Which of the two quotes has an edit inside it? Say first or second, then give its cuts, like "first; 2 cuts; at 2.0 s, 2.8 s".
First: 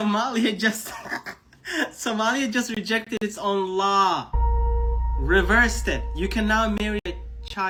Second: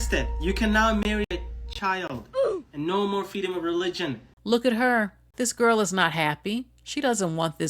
second; 2 cuts; at 4.3 s, 5.2 s